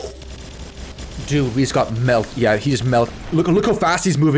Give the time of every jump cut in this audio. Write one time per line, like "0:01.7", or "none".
0:03.1

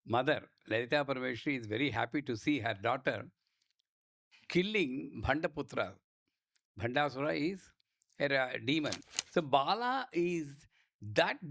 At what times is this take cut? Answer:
0:09.0

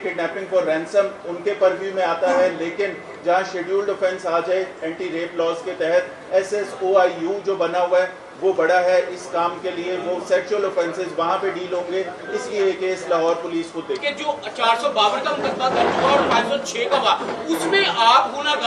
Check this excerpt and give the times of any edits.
0:14.0

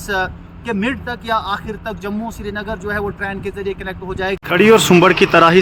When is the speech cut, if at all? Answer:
0:04.3

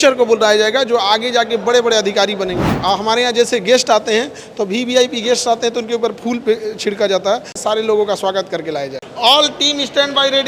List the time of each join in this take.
0:02.7
0:07.6
0:09.0

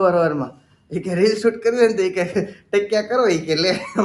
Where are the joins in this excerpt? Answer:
none

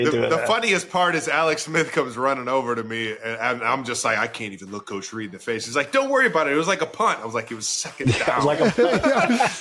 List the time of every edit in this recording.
none

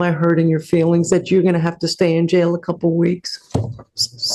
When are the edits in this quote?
none

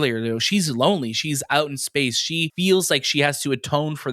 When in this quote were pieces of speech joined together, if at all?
0:02.5

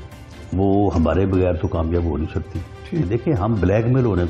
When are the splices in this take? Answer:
0:03.1

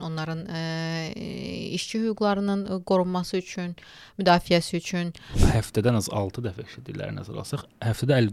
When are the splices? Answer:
0:05.4

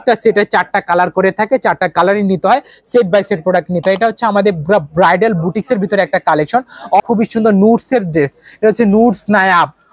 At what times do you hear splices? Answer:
0:07.0

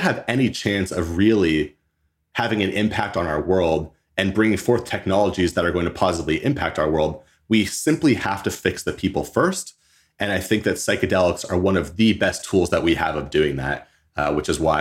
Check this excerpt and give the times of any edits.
none

